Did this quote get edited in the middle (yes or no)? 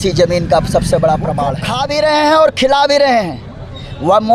yes